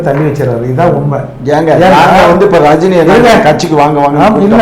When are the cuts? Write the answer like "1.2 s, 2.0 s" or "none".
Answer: none